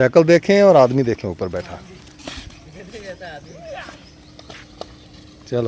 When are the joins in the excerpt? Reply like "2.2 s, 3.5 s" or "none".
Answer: none